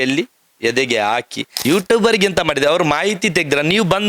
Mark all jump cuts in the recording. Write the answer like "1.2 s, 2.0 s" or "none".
1.4 s